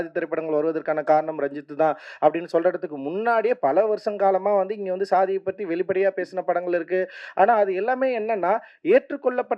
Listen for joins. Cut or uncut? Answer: uncut